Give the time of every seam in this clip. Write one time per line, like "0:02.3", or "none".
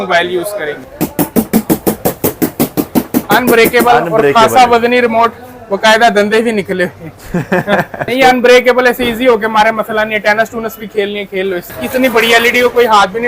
0:00.8
0:08.1
0:11.8